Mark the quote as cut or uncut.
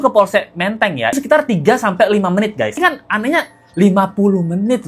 cut